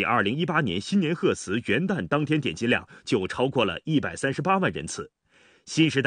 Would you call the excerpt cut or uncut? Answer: uncut